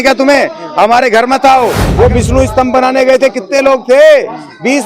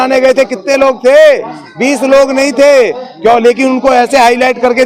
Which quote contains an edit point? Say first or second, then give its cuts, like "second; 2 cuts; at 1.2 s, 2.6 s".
first; 1 cut; at 1.8 s